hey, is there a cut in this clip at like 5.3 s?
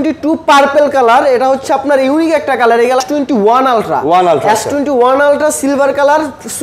no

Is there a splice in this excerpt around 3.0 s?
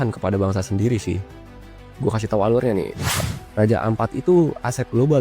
yes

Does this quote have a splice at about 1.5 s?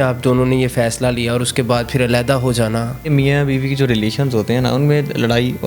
no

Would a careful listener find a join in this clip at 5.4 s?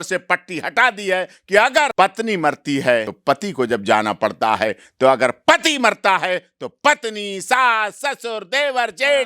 no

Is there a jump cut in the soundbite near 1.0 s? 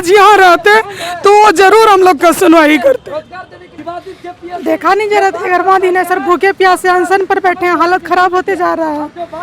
no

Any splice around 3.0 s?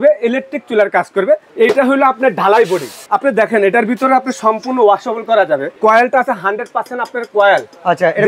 yes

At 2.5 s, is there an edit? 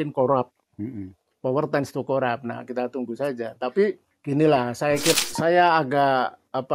no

